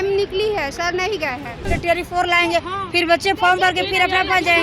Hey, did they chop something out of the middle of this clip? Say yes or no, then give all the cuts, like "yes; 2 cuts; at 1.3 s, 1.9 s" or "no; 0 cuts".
yes; 1 cut; at 1.7 s